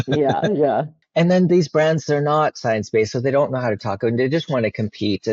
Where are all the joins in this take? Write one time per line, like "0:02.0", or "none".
none